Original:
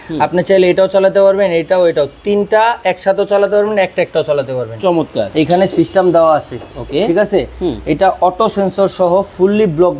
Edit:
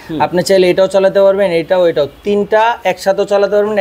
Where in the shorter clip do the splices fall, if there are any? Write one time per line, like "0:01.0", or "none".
none